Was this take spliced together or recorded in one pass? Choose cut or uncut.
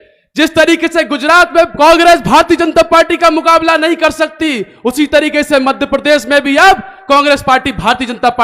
cut